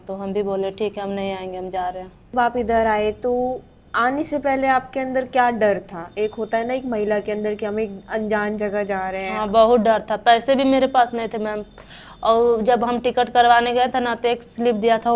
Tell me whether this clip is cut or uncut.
cut